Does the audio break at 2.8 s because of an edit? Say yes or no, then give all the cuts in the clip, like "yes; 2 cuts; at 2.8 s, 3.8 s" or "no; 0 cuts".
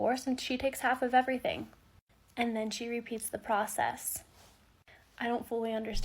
yes; 1 cut; at 2.8 s